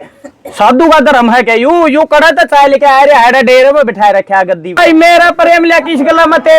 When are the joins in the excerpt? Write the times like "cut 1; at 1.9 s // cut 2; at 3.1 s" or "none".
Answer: cut 1; at 4.8 s